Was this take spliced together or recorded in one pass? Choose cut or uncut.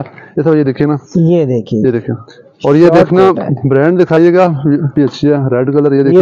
cut